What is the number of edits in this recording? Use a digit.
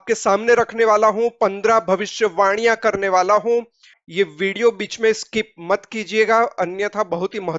0